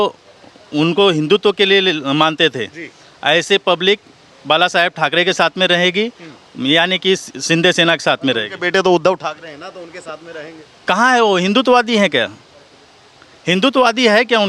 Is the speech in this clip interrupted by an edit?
no; 0 cuts

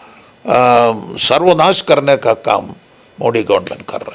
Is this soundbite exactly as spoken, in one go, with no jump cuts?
yes; 0 cuts

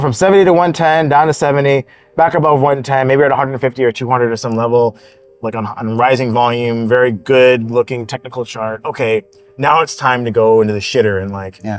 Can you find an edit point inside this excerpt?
no; 0 cuts

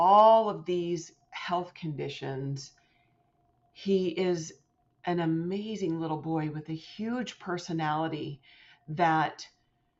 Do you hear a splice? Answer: no; 0 cuts

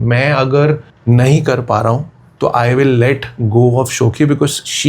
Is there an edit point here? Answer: yes; 1 cut; at 0.9 s

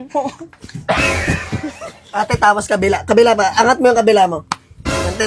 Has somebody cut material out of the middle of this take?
no; 0 cuts

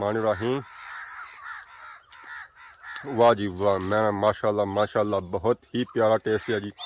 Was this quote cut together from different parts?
no; 0 cuts

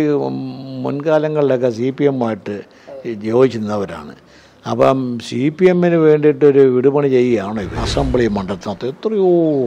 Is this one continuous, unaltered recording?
no; 1 cut; at 7.8 s

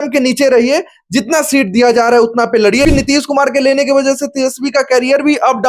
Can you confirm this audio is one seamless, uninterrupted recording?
no; 1 cut; at 2.8 s

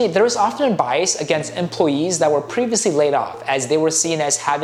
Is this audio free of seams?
yes; 0 cuts

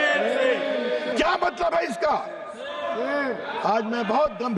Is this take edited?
yes; 1 cut; at 1.1 s

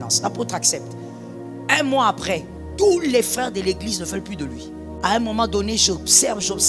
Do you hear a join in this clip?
yes; 1 cut; at 5.0 s

